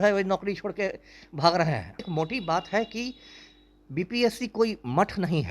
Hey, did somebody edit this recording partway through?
yes; 1 cut; at 2.1 s

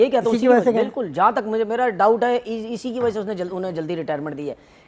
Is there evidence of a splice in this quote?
no; 0 cuts

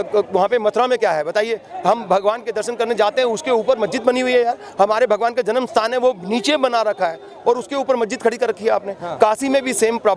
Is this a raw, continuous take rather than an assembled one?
yes; 0 cuts

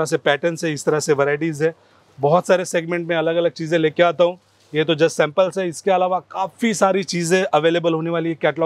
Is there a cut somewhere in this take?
no; 0 cuts

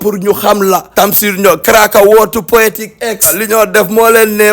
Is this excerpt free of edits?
no; 2 cuts; at 1.0 s, 3.4 s

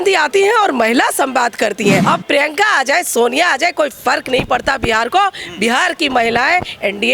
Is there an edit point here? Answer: yes; 1 cut; at 2.0 s

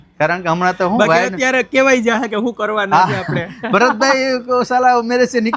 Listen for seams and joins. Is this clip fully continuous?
yes; 0 cuts

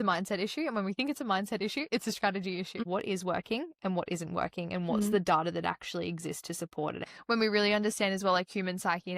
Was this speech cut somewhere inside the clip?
yes; 2 cuts; at 2.8 s, 7.0 s

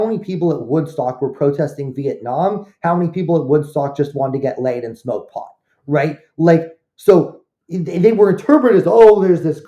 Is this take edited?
no; 0 cuts

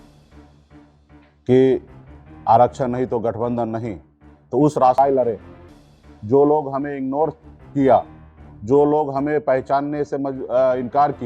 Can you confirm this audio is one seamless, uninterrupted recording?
no; 1 cut; at 5.0 s

